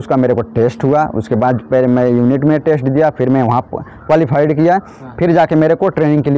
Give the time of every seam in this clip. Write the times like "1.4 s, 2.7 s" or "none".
none

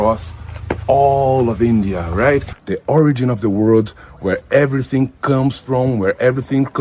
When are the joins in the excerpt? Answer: 2.6 s

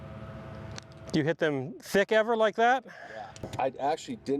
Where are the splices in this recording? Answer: 1.1 s, 3.4 s

